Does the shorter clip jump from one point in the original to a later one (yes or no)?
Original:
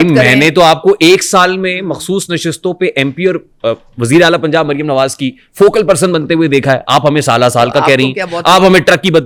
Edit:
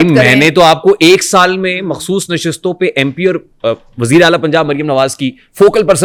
no